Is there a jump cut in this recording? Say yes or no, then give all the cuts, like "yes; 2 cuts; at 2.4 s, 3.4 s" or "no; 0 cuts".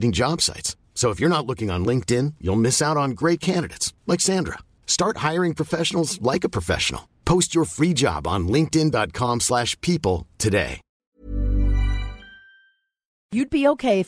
yes; 2 cuts; at 10.9 s, 13.3 s